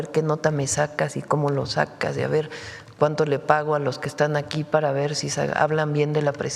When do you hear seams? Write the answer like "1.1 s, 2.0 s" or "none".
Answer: none